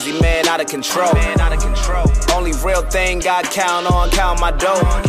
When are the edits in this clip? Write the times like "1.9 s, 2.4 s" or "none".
none